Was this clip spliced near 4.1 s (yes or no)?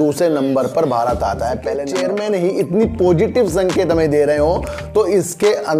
no